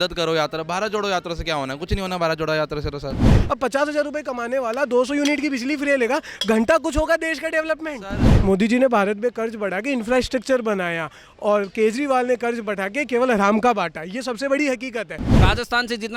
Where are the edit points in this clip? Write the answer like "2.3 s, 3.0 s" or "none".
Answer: 3.3 s, 8.3 s, 15.3 s